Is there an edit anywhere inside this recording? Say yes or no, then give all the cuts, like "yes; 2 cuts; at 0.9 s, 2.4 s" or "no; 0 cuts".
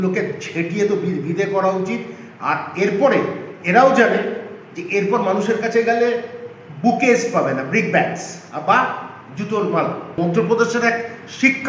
yes; 1 cut; at 10.1 s